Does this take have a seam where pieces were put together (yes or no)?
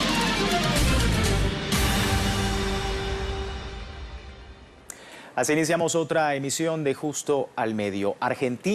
yes